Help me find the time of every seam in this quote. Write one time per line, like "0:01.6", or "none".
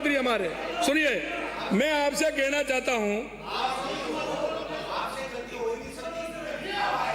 none